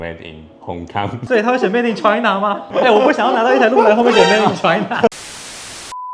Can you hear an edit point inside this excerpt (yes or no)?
no